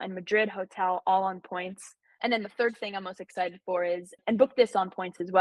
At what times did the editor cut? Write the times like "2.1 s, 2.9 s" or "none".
2.1 s